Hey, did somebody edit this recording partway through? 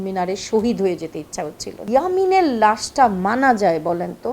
yes; 1 cut; at 1.8 s

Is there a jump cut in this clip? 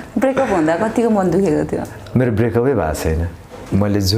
no; 0 cuts

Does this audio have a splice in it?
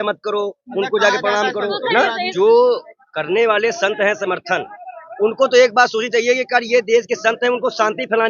yes; 1 cut; at 2.3 s

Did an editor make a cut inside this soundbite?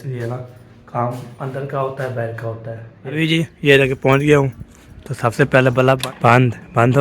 yes; 2 cuts; at 3.0 s, 6.0 s

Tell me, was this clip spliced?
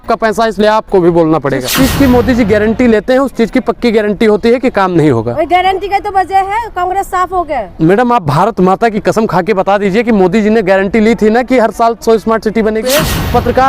yes; 2 cuts; at 1.7 s, 12.9 s

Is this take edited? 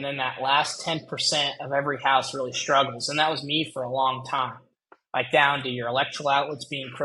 no; 0 cuts

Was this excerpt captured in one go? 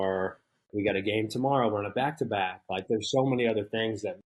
yes; 0 cuts

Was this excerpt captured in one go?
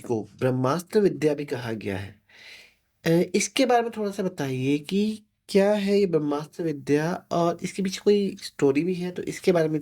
yes; 0 cuts

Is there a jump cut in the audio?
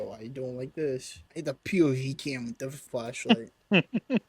yes; 2 cuts; at 1.2 s, 2.8 s

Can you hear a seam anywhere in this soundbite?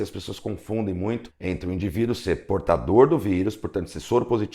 yes; 1 cut; at 1.3 s

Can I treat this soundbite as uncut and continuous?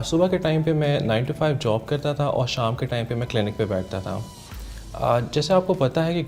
yes; 0 cuts

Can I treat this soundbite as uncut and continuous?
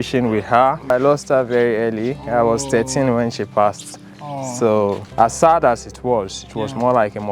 no; 2 cuts; at 0.9 s, 5.0 s

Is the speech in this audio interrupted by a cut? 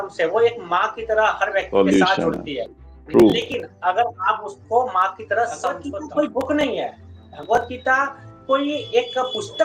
yes; 1 cut; at 5.9 s

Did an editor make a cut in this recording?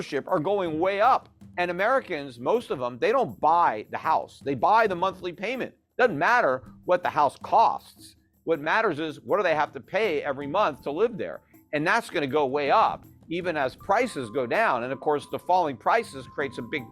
yes; 1 cut; at 1.4 s

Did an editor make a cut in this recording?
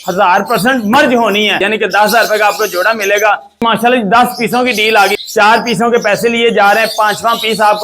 yes; 3 cuts; at 1.6 s, 3.6 s, 5.2 s

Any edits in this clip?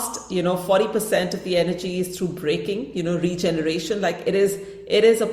no; 0 cuts

